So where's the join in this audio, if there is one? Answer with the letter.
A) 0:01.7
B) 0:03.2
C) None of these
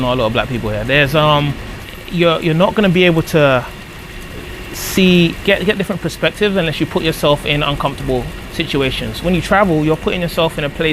A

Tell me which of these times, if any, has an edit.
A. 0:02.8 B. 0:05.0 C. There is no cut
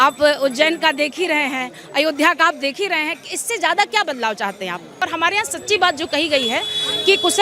B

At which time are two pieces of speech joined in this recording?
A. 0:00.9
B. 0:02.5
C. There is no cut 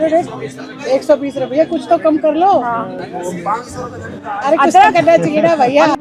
C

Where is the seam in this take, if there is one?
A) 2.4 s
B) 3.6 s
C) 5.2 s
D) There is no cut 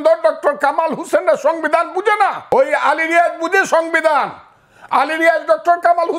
A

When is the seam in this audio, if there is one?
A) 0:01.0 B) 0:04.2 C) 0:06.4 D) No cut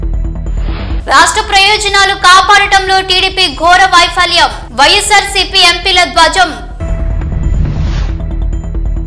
A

